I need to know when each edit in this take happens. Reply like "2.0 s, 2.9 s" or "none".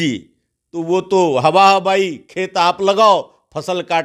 none